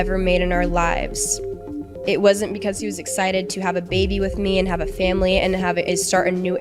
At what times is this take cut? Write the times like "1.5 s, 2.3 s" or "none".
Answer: none